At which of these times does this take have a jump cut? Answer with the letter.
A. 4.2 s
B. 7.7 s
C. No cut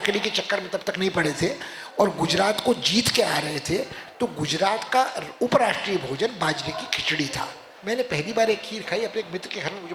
B